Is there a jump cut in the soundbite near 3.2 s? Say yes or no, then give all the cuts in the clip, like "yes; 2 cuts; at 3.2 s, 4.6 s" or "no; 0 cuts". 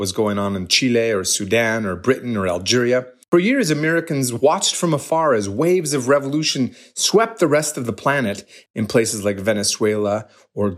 yes; 2 cuts; at 3.2 s, 8.6 s